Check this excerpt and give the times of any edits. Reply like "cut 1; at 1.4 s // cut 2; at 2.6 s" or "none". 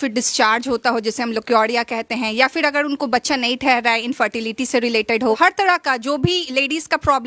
cut 1; at 5.4 s

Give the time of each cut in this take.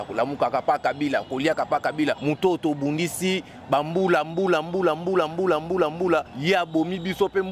cut 1; at 2.2 s // cut 2; at 6.3 s

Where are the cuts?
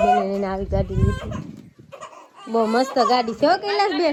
none

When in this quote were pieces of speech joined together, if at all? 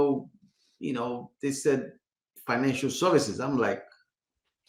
none

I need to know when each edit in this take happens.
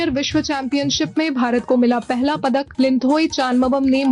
cut 1; at 2.7 s

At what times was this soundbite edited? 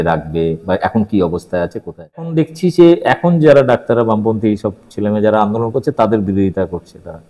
cut 1; at 2.3 s

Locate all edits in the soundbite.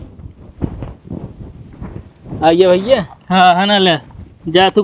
none

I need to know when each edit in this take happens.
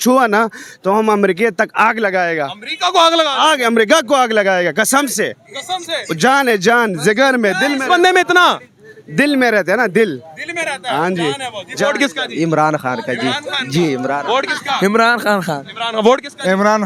none

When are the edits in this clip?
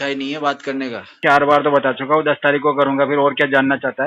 cut 1; at 1.2 s

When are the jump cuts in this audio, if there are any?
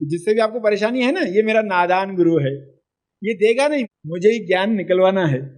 cut 1; at 3.9 s

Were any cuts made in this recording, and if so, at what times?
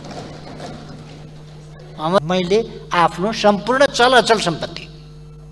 cut 1; at 2.2 s

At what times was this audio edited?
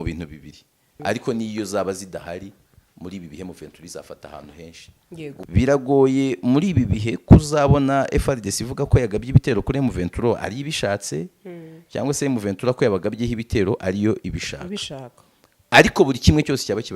cut 1; at 0.9 s // cut 2; at 5.4 s

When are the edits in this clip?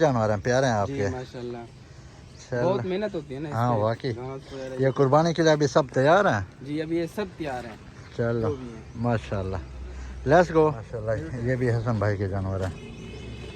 cut 1; at 10.8 s

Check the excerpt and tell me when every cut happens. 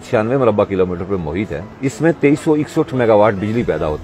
cut 1; at 1.6 s

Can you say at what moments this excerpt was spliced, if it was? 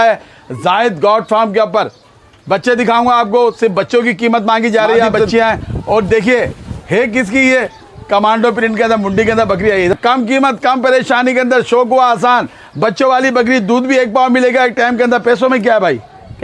cut 1; at 5.3 s // cut 2; at 9.9 s

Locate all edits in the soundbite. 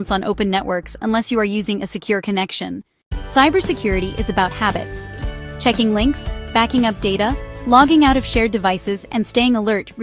none

